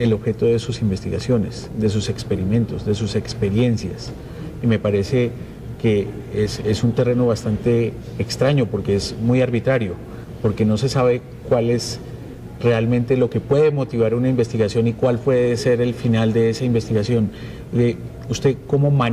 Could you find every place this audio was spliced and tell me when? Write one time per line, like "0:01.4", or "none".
0:08.9